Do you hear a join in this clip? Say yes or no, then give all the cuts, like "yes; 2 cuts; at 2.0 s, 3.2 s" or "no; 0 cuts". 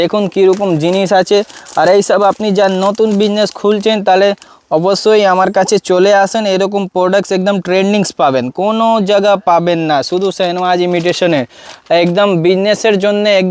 no; 0 cuts